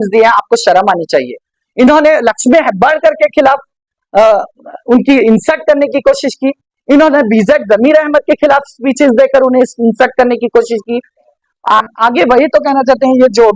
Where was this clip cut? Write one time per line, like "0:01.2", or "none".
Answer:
0:11.2